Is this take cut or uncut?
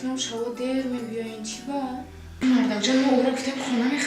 cut